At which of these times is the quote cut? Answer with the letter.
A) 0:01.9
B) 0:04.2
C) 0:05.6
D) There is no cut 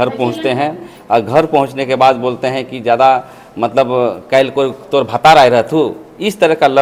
D